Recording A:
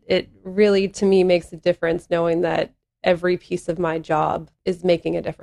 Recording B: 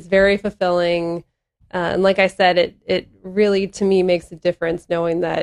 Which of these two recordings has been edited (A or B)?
A